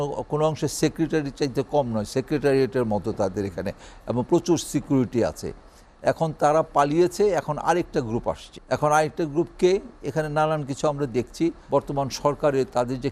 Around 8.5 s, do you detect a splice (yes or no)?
yes